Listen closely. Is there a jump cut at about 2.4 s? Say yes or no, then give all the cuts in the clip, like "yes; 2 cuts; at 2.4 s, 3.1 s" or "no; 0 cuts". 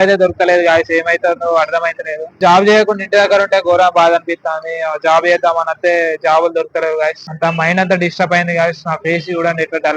yes; 2 cuts; at 2.4 s, 7.2 s